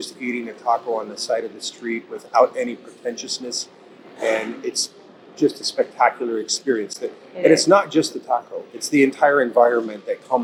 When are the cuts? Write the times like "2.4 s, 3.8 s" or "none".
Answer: none